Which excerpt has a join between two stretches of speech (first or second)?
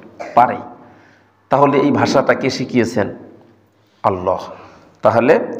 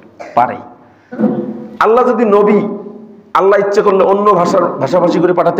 second